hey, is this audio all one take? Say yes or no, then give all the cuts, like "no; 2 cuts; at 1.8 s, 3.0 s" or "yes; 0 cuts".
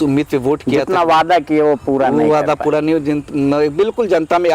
yes; 0 cuts